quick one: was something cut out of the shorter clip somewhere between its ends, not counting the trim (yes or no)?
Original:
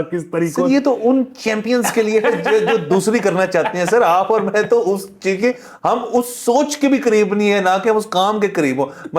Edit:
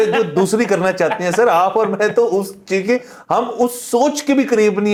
no